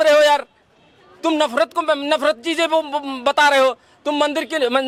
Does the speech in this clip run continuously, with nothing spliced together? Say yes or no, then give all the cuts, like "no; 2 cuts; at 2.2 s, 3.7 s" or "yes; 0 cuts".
yes; 0 cuts